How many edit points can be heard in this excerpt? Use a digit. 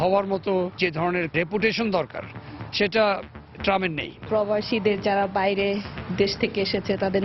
2